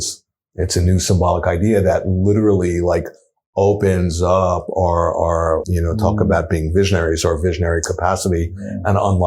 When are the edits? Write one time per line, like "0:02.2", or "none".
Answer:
0:05.7